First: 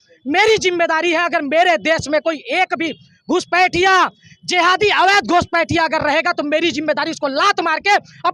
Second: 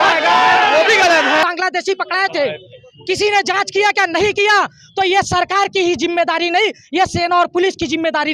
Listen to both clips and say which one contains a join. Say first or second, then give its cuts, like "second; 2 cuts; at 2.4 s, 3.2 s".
second; 1 cut; at 1.4 s